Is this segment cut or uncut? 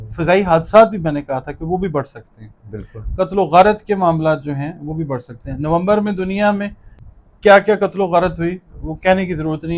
uncut